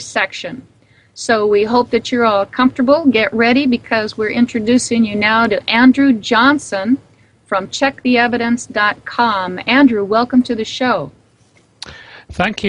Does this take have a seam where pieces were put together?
yes; 1 cut; at 7.7 s

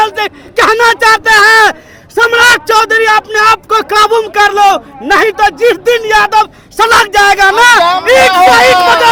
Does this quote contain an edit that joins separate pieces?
no; 0 cuts

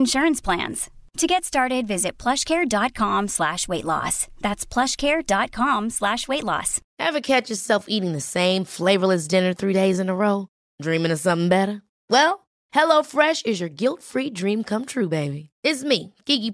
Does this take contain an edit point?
yes; 1 cut; at 6.8 s

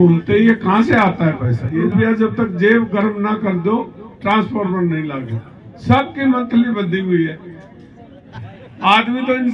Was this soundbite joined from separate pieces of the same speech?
yes; 2 cuts; at 1.8 s, 8.4 s

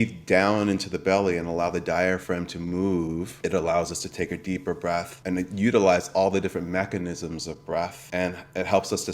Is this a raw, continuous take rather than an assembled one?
no; 3 cuts; at 3.3 s, 5.2 s, 8.0 s

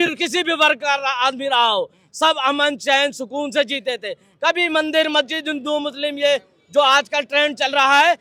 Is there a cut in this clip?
no; 0 cuts

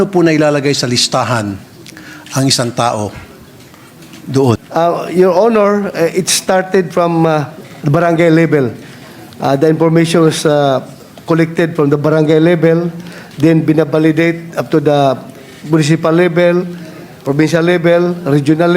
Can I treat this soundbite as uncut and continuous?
no; 1 cut; at 4.6 s

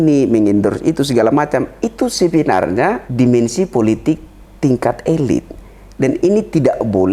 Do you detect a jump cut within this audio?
yes; 1 cut; at 3.0 s

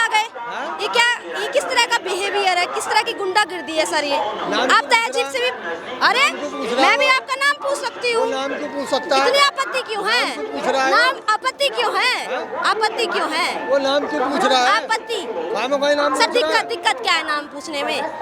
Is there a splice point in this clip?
no; 0 cuts

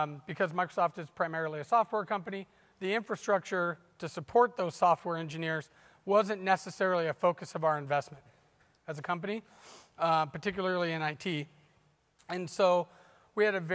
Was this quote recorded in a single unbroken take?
no; 1 cut; at 10.5 s

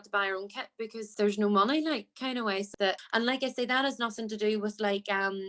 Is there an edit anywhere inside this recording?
yes; 2 cuts; at 1.0 s, 2.8 s

